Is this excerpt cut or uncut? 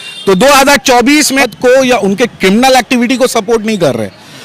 cut